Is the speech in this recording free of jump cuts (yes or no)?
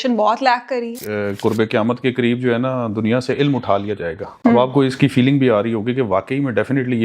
no